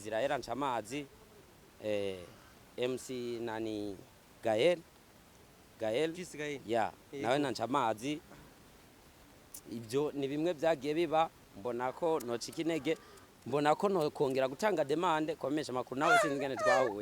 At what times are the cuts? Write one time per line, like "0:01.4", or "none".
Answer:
none